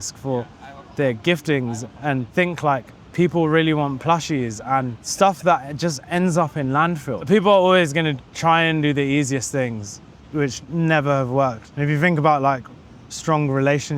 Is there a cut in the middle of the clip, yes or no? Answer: yes